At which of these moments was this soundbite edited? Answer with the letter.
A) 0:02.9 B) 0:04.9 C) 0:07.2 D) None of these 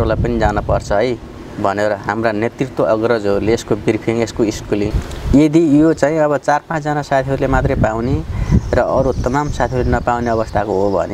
B